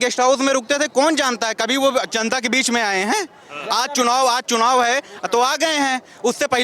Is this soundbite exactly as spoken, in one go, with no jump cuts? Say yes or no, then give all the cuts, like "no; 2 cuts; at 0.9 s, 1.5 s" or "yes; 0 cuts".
yes; 0 cuts